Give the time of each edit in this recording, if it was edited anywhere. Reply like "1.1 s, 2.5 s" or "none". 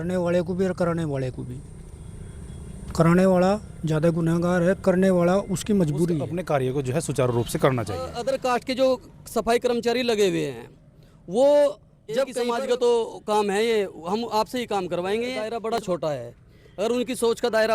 6.3 s, 8.1 s, 12.4 s, 15.4 s

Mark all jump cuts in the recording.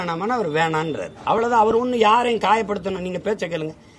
none

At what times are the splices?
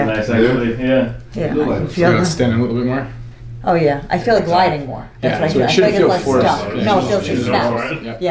none

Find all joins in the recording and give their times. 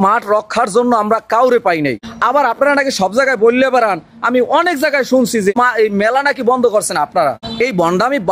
2.1 s, 5.5 s, 7.5 s

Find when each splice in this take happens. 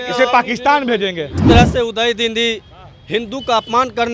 1.4 s

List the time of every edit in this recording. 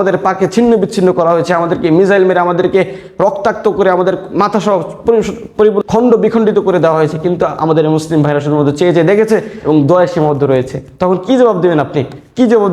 5.8 s

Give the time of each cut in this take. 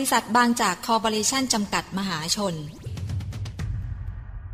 2.9 s

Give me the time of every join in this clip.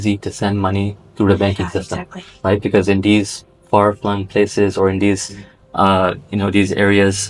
none

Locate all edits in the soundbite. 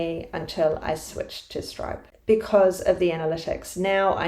2.1 s

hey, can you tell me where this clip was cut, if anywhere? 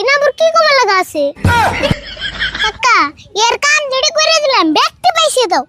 1.4 s, 2.6 s

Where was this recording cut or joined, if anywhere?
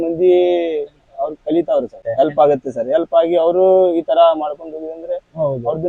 none

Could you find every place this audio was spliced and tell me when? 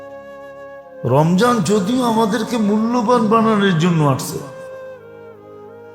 1.0 s, 4.5 s

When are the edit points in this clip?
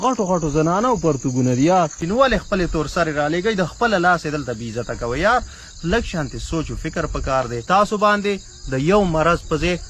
2.0 s, 7.6 s

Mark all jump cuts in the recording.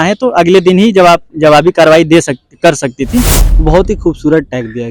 3.4 s

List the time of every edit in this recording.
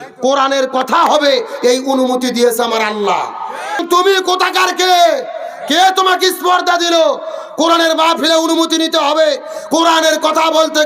3.8 s

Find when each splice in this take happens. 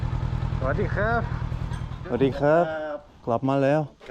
1.9 s

